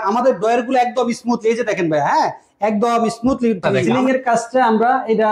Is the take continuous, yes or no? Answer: no